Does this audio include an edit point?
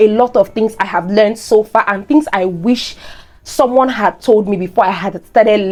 no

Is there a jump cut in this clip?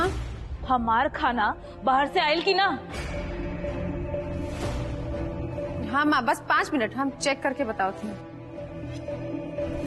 no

